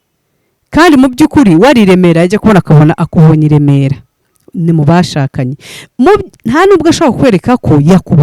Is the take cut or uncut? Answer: uncut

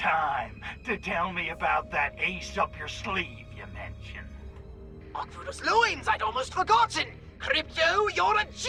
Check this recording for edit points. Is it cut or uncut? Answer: uncut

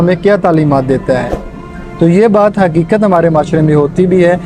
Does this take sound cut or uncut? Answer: uncut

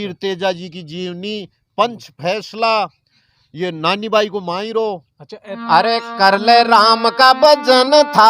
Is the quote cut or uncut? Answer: cut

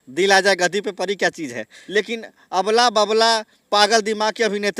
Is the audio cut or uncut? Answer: cut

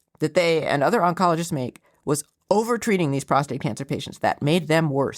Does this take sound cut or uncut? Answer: uncut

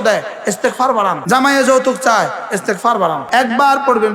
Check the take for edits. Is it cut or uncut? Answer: cut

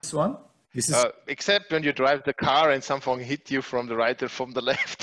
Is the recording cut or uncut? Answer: uncut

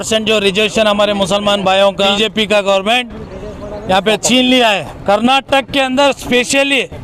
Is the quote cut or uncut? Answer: cut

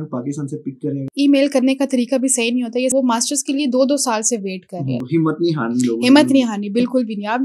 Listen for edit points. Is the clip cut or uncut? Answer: cut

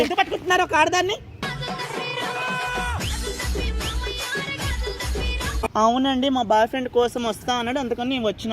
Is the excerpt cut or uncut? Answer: cut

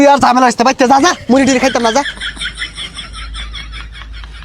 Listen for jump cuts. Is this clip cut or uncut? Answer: cut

